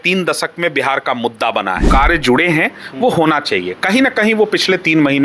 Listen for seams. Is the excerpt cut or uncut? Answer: cut